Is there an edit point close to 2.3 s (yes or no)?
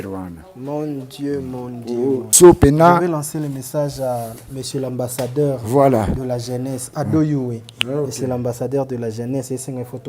yes